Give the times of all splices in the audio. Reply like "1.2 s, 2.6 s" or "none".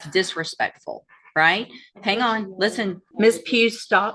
3.0 s